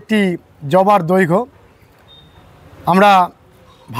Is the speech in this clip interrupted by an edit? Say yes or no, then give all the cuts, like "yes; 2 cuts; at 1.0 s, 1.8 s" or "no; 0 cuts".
no; 0 cuts